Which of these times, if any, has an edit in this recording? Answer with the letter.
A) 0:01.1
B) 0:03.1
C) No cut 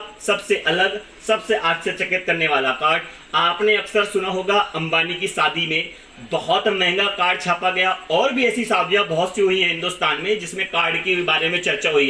C